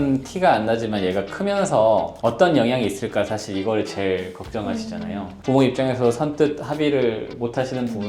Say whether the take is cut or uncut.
uncut